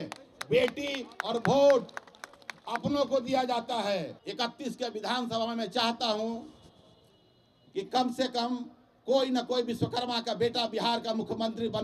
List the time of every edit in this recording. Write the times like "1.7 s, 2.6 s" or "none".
4.2 s